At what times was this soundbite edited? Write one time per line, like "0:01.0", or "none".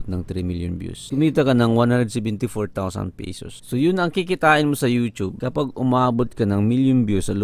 none